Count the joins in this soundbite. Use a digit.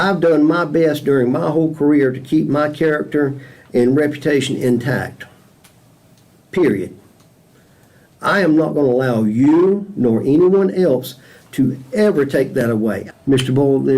1